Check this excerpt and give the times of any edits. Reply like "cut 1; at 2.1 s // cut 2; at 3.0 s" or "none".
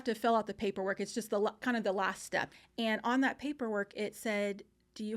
cut 1; at 2.5 s